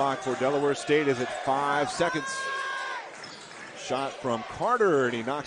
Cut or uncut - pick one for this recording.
uncut